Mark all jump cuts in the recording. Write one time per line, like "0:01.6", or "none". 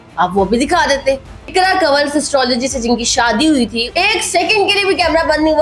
0:01.3
0:03.8